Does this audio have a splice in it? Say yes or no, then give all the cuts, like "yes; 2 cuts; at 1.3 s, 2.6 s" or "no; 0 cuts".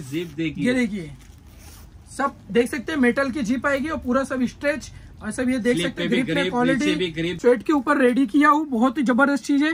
yes; 1 cut; at 7.4 s